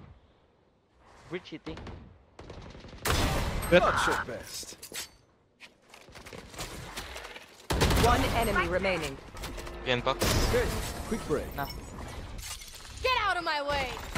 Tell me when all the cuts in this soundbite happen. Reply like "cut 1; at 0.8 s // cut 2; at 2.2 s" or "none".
cut 1; at 12.4 s